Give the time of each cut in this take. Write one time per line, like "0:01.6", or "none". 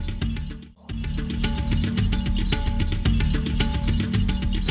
0:01.1
0:03.5